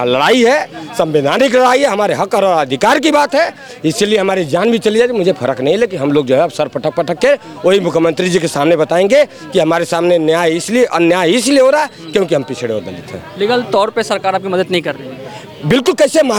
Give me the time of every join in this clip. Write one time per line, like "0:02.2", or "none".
none